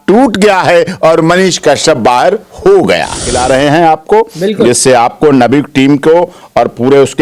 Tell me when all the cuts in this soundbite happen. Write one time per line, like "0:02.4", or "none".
0:03.3